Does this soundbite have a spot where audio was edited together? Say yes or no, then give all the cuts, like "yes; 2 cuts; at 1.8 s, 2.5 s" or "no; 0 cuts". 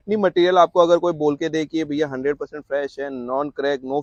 no; 0 cuts